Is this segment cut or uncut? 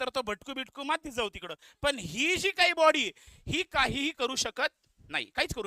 uncut